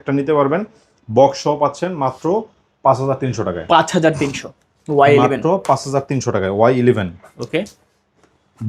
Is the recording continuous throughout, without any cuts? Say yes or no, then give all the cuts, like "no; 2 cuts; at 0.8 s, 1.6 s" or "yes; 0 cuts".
yes; 0 cuts